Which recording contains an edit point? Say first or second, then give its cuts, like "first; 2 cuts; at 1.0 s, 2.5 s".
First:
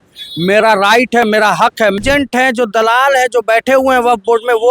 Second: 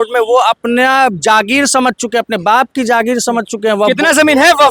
first; 1 cut; at 2.0 s